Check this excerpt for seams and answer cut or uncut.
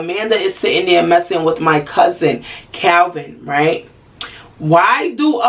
uncut